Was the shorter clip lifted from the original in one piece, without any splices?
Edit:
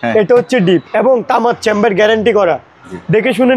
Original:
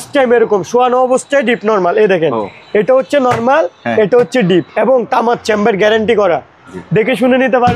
yes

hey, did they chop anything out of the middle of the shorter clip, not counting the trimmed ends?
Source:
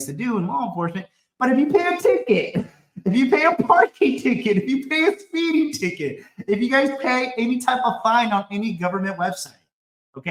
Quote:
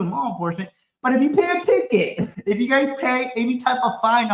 yes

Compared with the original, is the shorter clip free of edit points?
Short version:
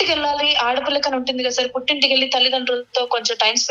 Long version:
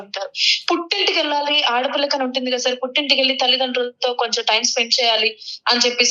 yes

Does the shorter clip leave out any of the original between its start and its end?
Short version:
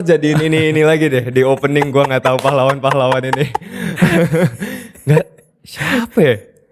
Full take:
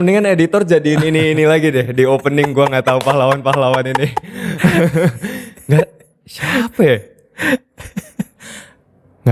no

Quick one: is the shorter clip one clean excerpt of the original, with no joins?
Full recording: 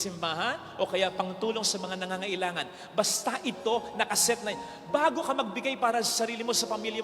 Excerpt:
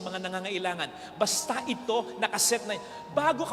yes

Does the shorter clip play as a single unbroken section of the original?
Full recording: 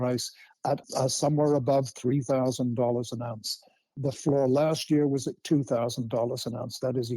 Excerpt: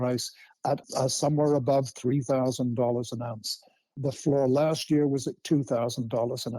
yes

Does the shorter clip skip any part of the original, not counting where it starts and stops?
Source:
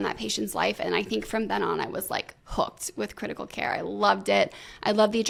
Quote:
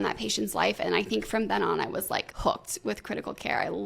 yes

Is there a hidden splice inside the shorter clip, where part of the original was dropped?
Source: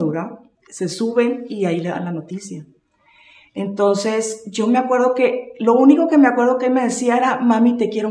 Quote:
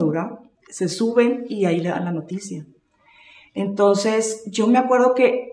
no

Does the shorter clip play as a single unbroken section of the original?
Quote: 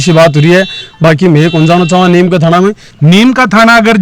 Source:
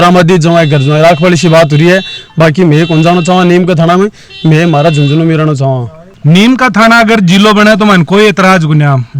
no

